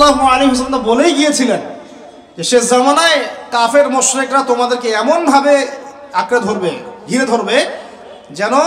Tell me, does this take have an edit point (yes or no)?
no